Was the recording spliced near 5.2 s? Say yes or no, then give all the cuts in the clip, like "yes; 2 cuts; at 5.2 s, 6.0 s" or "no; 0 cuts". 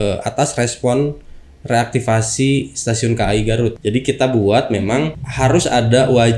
yes; 2 cuts; at 3.8 s, 5.2 s